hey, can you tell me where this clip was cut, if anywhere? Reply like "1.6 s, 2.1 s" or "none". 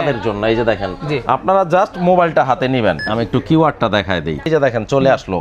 3.0 s, 4.5 s